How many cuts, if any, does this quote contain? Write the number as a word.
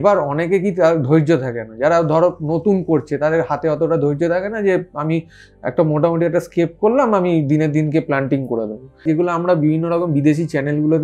one